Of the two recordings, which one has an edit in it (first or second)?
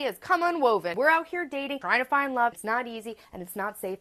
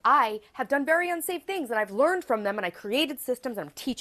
first